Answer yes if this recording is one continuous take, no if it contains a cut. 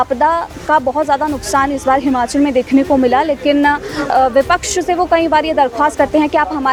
yes